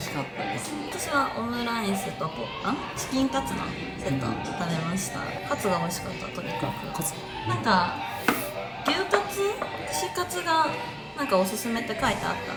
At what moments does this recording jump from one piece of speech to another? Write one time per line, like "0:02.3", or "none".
none

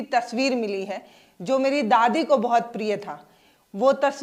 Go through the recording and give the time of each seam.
none

